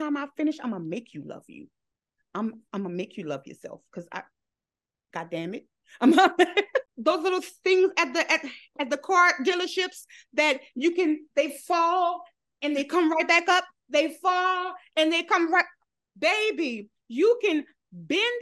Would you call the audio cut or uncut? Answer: cut